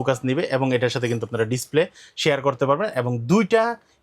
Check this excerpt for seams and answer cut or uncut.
uncut